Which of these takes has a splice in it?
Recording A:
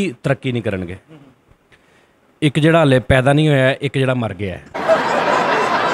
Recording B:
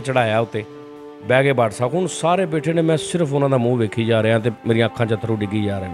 A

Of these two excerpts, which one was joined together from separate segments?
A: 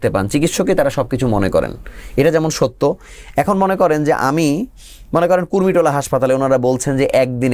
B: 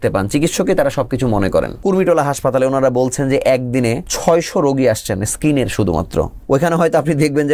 B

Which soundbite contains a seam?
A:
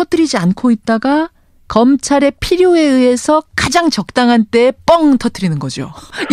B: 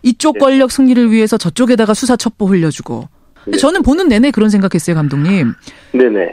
B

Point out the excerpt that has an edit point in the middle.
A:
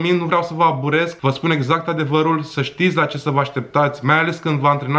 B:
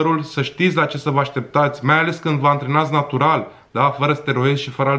A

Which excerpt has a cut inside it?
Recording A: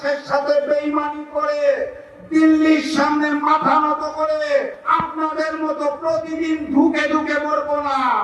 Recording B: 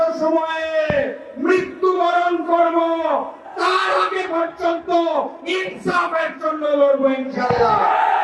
A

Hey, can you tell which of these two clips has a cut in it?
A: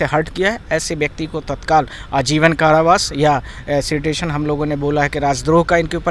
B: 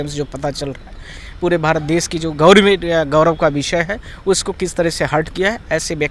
B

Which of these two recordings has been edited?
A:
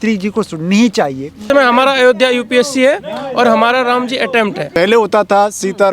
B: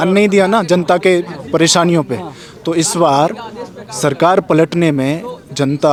A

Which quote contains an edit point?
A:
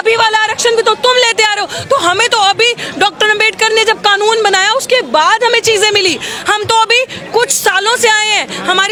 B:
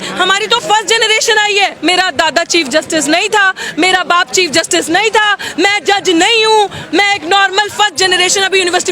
B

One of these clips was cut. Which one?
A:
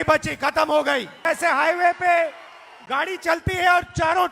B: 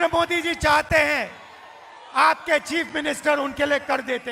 A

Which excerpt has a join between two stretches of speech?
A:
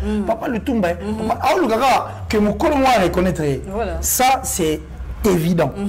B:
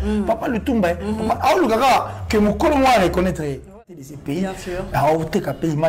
B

